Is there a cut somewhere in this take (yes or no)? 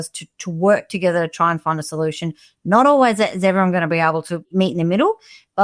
yes